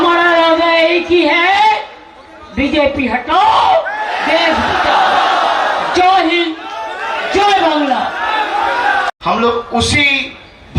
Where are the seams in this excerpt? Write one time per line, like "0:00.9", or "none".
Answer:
0:09.1